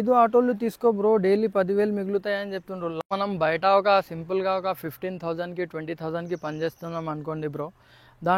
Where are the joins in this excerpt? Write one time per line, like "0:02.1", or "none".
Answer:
0:03.0